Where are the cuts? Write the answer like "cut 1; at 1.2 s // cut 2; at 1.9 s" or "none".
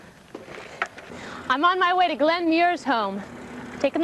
cut 1; at 2.6 s